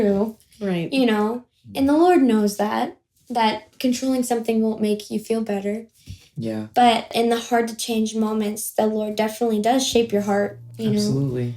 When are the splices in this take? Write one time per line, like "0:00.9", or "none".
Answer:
0:07.1
0:10.6